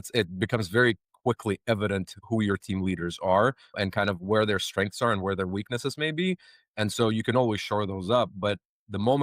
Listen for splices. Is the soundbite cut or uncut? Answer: cut